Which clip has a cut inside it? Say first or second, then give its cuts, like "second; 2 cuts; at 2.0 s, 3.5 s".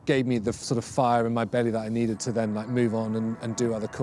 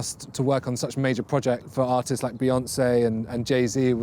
second; 1 cut; at 1.7 s